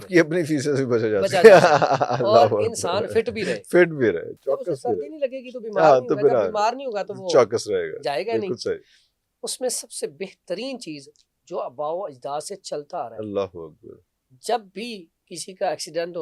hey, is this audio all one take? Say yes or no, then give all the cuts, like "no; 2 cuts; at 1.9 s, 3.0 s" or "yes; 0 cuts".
yes; 0 cuts